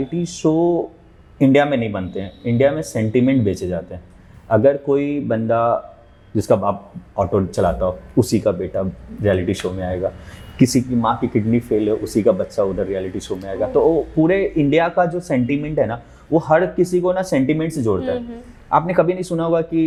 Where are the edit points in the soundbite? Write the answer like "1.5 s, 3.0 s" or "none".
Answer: none